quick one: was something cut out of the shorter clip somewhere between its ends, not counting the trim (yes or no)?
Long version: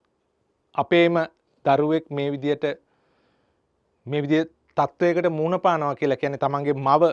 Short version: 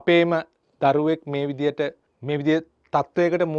yes